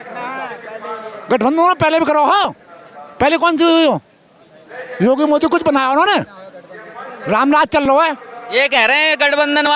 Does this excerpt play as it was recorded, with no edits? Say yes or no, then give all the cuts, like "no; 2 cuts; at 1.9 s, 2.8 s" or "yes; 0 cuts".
yes; 0 cuts